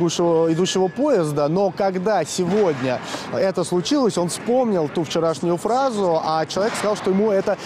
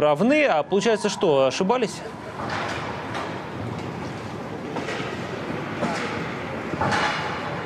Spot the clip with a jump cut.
first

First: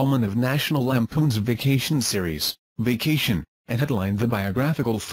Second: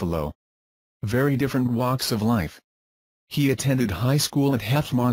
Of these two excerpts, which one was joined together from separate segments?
first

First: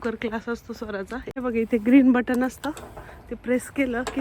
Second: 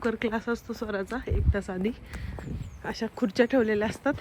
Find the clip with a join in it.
first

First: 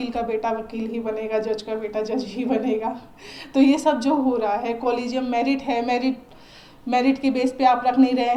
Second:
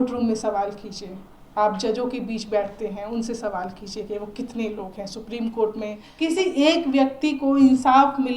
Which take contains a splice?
second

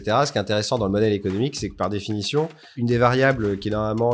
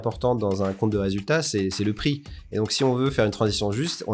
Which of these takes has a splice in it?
first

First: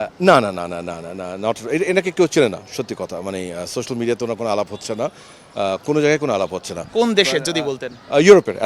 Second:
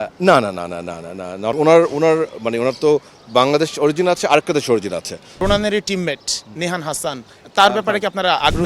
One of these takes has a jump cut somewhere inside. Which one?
second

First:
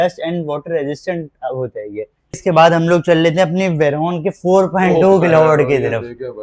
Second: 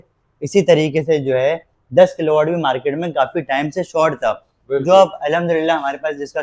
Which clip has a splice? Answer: first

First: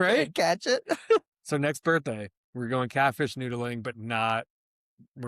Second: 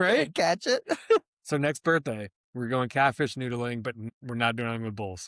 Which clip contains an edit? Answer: second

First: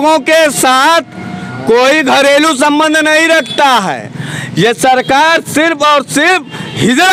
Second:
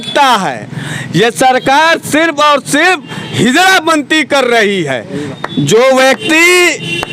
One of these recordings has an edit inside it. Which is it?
second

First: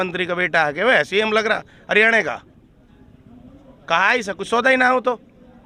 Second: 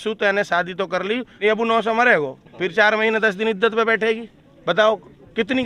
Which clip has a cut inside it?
second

